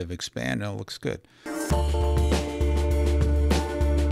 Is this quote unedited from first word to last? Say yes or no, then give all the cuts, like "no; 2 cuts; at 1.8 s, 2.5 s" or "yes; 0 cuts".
no; 1 cut; at 1.3 s